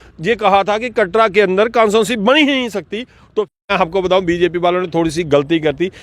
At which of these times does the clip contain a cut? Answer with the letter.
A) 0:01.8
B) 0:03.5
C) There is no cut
B